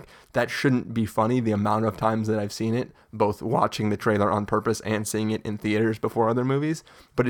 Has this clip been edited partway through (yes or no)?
no